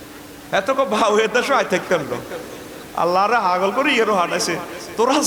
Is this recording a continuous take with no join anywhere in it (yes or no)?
yes